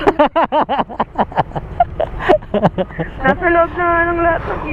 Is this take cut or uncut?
uncut